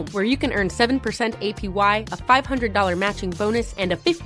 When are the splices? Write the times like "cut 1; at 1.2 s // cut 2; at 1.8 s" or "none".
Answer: none